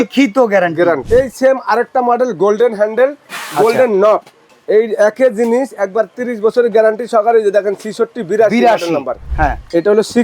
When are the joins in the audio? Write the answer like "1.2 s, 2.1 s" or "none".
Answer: 1.0 s, 4.5 s, 9.2 s